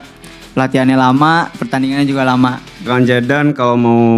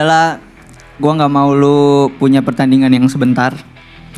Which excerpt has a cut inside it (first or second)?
first